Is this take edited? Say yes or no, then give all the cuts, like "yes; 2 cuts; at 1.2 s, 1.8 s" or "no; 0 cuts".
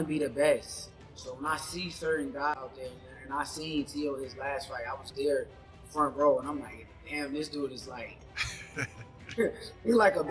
yes; 1 cut; at 2.5 s